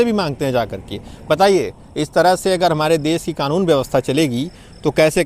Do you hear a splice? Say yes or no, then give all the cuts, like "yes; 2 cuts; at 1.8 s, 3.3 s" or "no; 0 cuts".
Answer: no; 0 cuts